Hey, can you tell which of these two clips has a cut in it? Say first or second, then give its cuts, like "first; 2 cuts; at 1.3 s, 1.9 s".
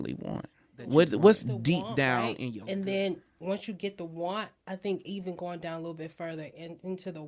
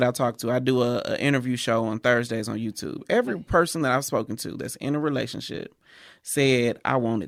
first; 1 cut; at 2.3 s